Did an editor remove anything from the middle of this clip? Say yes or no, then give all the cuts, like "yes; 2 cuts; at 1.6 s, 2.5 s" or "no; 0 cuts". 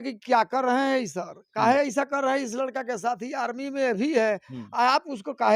no; 0 cuts